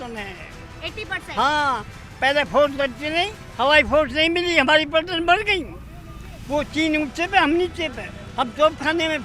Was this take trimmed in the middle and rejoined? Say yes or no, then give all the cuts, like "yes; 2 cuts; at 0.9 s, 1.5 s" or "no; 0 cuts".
no; 0 cuts